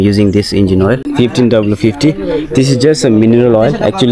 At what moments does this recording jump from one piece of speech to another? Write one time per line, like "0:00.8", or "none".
0:01.1